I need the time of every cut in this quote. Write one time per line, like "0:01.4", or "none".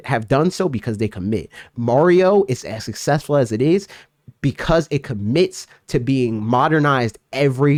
none